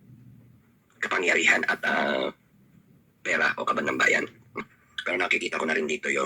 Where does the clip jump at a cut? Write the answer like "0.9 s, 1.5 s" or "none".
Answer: 4.6 s